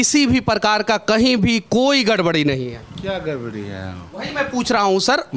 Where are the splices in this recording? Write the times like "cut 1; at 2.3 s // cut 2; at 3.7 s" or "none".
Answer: cut 1; at 4.1 s